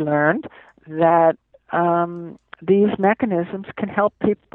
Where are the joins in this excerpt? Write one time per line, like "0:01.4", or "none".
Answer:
none